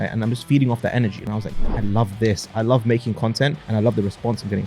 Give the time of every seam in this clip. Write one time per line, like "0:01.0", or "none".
0:01.3
0:03.6